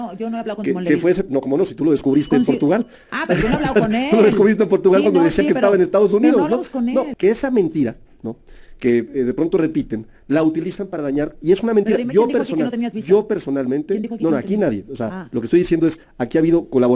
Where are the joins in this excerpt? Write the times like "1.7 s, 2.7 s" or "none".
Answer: 7.1 s